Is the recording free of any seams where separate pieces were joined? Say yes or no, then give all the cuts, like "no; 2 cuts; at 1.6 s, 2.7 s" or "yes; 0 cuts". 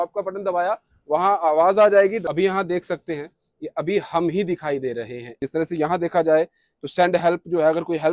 no; 2 cuts; at 2.2 s, 5.4 s